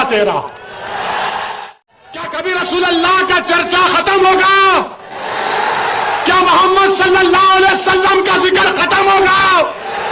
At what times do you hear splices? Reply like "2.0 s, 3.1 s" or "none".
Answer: 1.6 s

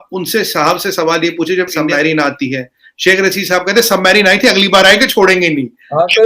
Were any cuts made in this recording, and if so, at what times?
1.8 s

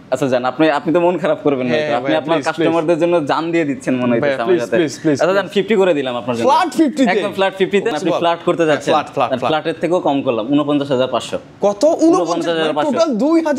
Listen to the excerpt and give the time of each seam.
7.9 s

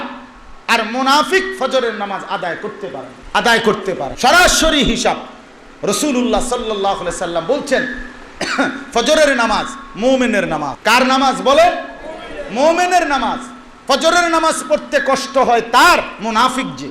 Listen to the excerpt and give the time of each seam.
3.1 s, 4.1 s, 10.7 s

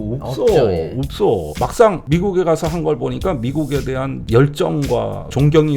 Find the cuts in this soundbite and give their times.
1.5 s

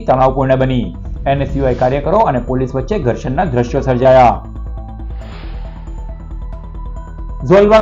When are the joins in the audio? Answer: none

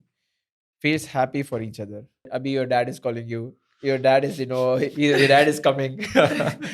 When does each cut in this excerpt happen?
2.3 s

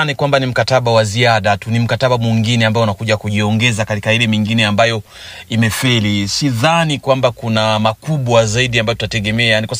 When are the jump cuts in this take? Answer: none

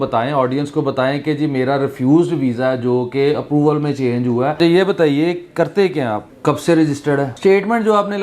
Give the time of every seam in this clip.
4.6 s, 6.3 s, 7.3 s

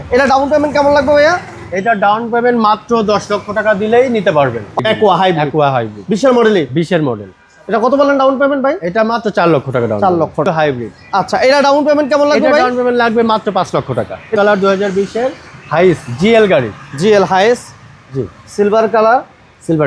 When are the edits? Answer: 4.8 s, 10.5 s, 14.3 s

